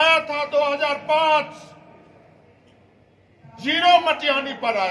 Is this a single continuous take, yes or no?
yes